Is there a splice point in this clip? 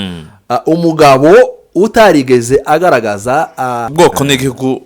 yes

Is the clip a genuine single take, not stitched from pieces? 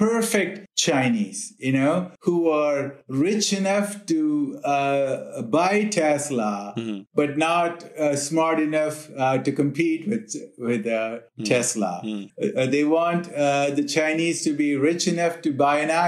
yes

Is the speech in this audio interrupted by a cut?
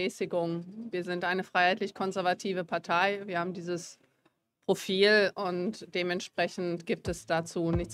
no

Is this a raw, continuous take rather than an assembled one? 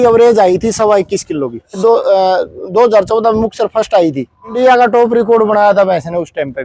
no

